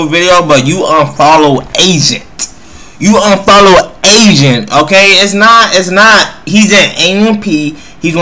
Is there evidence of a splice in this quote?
no; 0 cuts

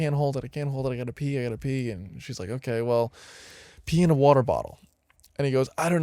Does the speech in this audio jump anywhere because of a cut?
no; 0 cuts

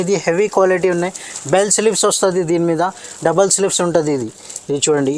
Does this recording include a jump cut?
no; 0 cuts

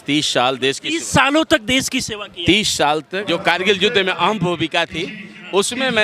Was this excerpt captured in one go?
no; 1 cut; at 3.3 s

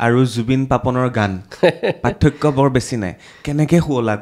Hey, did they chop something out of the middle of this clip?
no; 0 cuts

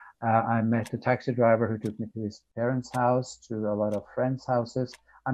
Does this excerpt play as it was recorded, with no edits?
yes; 0 cuts

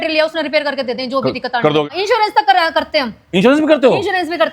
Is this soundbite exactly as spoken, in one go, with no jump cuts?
no; 1 cut; at 1.9 s

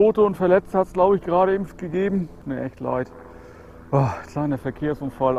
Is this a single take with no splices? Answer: no; 1 cut; at 2.4 s

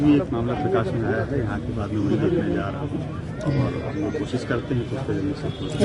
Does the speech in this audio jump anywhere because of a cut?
no; 0 cuts

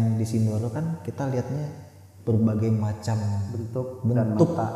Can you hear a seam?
no; 0 cuts

